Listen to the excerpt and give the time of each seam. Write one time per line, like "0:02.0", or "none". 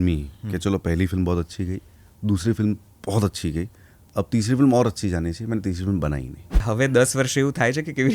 0:06.7